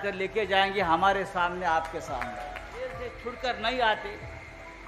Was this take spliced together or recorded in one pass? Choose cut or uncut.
cut